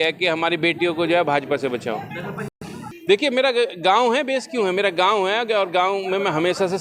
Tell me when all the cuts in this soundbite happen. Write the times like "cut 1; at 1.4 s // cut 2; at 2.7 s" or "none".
cut 1; at 2.8 s